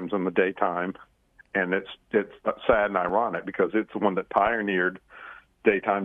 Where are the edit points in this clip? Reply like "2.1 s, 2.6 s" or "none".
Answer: none